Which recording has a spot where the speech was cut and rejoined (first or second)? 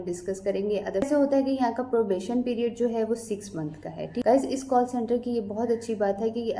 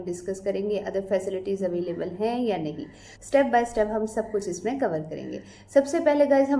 first